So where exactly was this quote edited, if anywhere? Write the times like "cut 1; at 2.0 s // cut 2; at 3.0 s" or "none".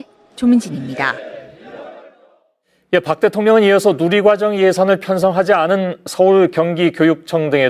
cut 1; at 4.4 s